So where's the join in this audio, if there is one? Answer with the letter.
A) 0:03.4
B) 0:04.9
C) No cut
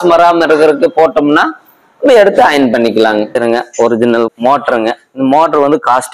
A